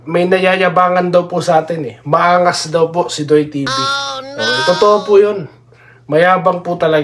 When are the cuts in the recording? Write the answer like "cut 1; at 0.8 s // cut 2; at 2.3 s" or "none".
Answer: none